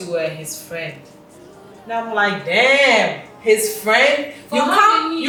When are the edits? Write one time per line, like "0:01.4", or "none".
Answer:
none

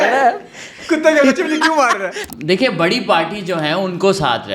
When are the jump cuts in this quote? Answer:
0:02.3

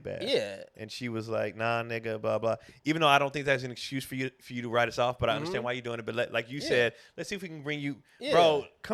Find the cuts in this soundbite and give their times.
none

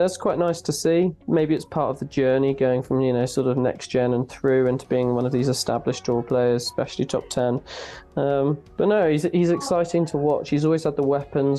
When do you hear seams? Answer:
none

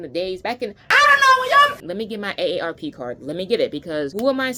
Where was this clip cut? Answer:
none

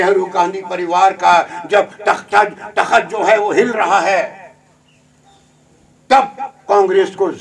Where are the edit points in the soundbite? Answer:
none

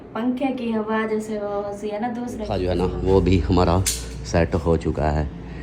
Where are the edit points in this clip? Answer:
0:02.5

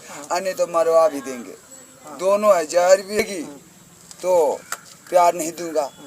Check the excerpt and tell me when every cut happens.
0:03.2

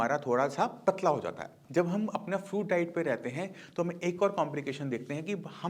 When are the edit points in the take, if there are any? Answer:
0:01.3

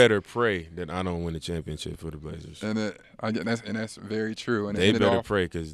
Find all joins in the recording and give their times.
0:03.0

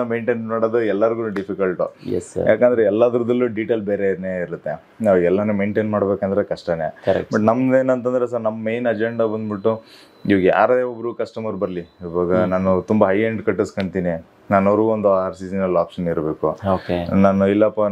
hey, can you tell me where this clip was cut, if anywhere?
none

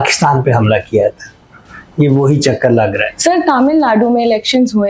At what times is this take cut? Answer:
0:03.1

